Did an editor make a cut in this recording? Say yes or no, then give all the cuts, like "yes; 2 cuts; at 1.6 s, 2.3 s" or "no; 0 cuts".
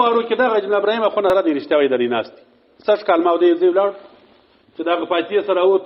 yes; 1 cut; at 1.3 s